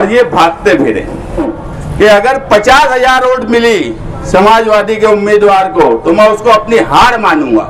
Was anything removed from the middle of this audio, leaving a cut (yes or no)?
yes